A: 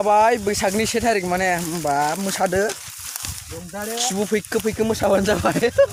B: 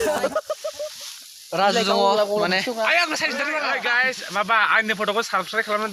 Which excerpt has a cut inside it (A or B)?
B